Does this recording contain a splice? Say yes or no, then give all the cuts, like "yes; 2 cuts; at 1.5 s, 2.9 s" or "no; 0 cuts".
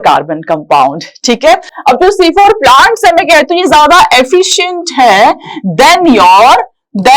no; 0 cuts